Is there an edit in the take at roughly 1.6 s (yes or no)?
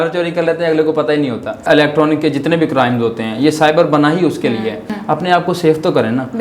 yes